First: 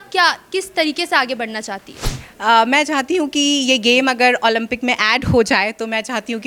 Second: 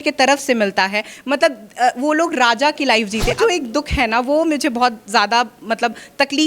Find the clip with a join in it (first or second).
second